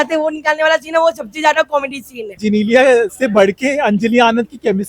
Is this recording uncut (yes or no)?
no